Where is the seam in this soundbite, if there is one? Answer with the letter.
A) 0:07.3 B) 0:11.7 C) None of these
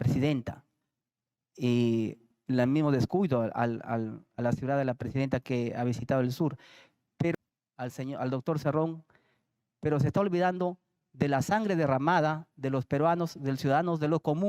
A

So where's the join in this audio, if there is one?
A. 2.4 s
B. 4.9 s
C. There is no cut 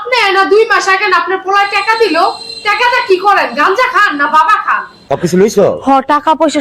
B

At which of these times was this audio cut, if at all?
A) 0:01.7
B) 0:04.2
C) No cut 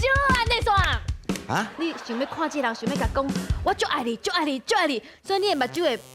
A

